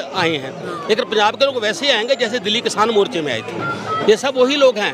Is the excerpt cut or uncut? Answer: uncut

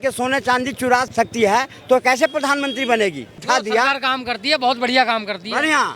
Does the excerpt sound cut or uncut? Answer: cut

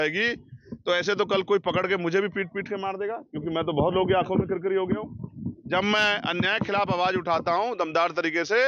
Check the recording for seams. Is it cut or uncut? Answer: uncut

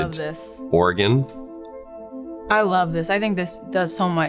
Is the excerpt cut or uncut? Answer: uncut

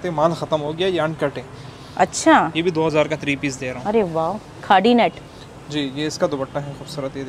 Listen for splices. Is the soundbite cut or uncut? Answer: uncut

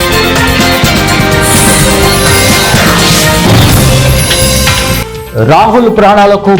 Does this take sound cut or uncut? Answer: uncut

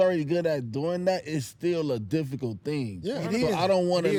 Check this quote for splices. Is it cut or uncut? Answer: uncut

